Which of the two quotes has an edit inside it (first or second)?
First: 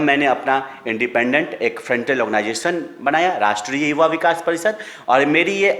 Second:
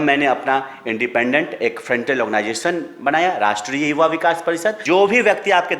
second